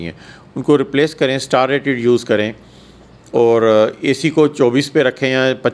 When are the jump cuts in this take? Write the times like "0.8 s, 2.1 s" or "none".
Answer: none